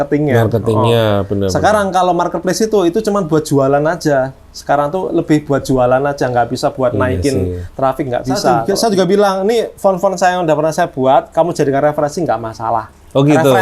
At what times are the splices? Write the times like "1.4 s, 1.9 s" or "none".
8.6 s